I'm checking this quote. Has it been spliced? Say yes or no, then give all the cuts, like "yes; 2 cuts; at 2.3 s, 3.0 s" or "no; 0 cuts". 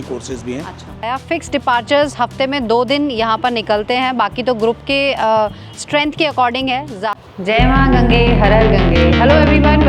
yes; 2 cuts; at 1.1 s, 7.0 s